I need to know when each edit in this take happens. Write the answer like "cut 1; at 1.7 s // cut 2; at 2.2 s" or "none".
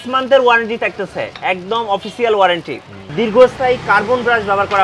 cut 1; at 3.1 s